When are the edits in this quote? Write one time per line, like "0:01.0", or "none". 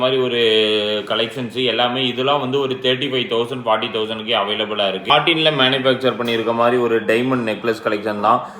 0:05.1